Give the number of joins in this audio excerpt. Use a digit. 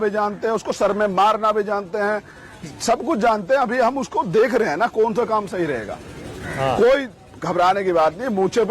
0